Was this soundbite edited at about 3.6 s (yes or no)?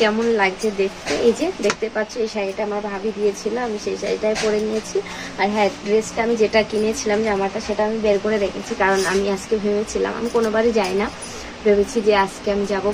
no